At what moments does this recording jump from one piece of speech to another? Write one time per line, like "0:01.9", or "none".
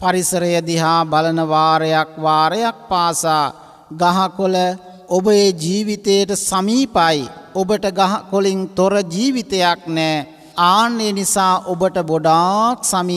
0:04.9
0:07.4
0:10.4